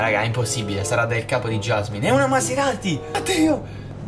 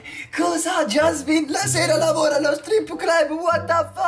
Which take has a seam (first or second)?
first